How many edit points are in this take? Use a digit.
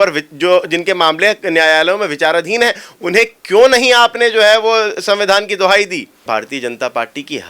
1